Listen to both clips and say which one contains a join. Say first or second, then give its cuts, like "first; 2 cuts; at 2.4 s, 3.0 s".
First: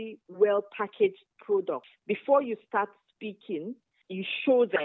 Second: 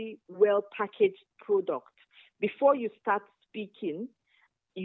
first; 2 cuts; at 1.9 s, 3.9 s